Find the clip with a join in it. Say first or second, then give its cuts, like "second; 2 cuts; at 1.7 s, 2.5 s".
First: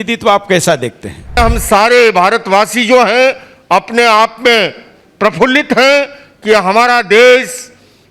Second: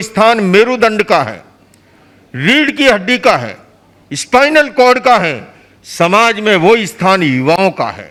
first; 1 cut; at 1.4 s